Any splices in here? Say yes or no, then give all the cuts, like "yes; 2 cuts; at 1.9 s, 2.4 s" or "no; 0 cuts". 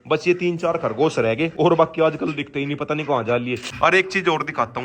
no; 0 cuts